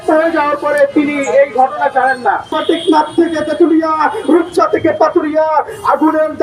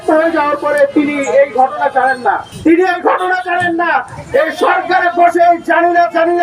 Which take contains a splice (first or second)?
first